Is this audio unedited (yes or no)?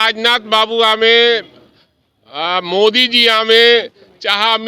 yes